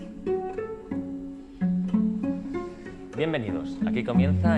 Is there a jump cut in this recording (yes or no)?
no